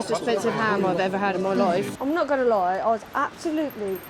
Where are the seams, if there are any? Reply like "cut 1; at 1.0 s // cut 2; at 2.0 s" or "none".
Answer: cut 1; at 1.9 s